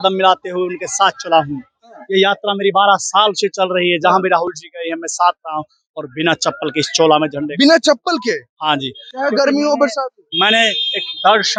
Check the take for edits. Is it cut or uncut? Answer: uncut